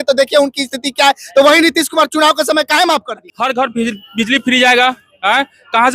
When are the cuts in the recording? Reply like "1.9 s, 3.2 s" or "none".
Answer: 3.2 s